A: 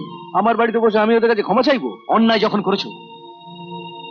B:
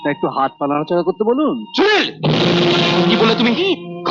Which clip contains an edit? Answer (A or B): B